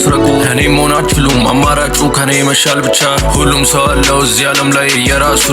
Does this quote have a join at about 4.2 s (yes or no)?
yes